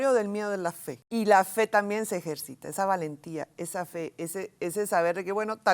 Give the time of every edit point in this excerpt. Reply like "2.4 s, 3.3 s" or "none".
0.9 s